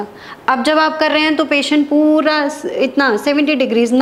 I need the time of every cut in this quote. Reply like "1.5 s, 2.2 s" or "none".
none